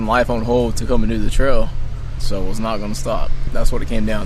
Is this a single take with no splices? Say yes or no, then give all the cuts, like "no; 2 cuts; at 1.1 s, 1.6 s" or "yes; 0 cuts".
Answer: no; 2 cuts; at 2.2 s, 3.4 s